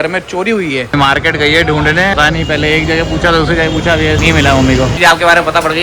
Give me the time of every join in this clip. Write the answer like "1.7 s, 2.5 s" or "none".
0.9 s, 2.1 s, 4.2 s, 4.9 s